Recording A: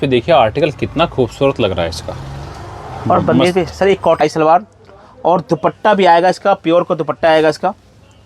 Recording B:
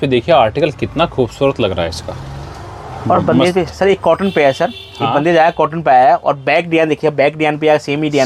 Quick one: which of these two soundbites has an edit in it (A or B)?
A